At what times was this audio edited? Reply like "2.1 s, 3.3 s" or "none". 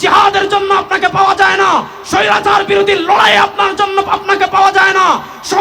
none